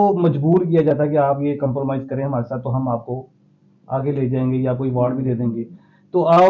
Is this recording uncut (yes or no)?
yes